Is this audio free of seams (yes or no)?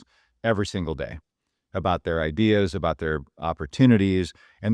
yes